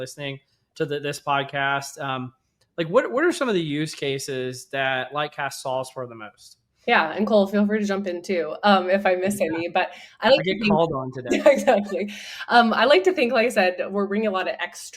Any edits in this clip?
no; 0 cuts

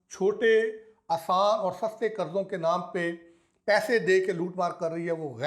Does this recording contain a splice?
no; 0 cuts

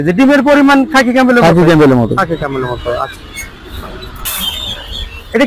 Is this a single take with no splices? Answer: yes; 0 cuts

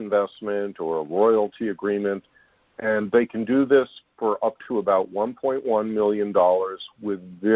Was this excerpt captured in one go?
yes; 0 cuts

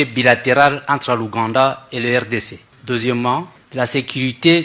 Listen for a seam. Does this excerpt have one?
yes; 2 cuts; at 2.7 s, 3.6 s

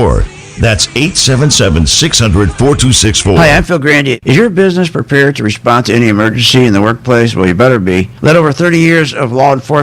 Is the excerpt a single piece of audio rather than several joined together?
no; 1 cut; at 3.4 s

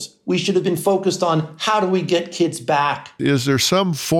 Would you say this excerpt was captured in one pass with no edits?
no; 1 cut; at 3.1 s

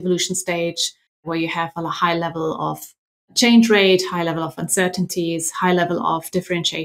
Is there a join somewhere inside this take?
yes; 1 cut; at 1.1 s

